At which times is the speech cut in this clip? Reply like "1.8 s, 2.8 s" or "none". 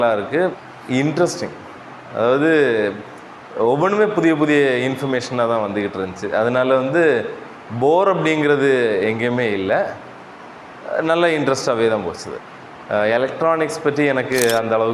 none